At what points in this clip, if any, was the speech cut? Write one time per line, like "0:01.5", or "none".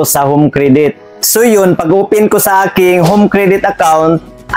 0:01.1